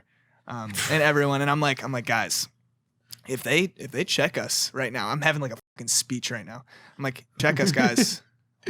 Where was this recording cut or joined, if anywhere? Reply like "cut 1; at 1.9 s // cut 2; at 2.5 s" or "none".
cut 1; at 7.4 s